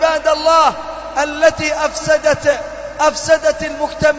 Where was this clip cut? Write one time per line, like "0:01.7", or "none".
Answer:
none